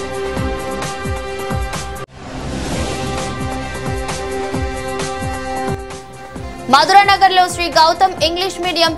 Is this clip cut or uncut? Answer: cut